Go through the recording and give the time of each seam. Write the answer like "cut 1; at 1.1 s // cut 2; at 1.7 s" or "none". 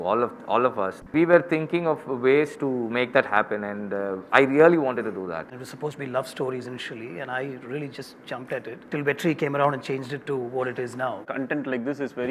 cut 1; at 1.1 s // cut 2; at 5.6 s // cut 3; at 8.8 s // cut 4; at 11.2 s